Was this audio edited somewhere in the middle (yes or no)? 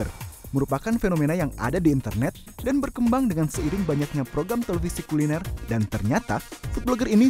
no